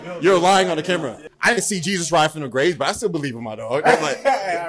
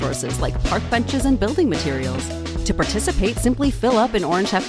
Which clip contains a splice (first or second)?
first